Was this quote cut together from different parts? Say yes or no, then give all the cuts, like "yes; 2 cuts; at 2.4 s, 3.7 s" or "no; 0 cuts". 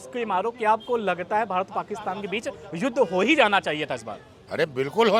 no; 0 cuts